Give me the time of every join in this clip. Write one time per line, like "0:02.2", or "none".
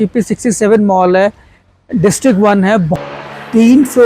0:02.9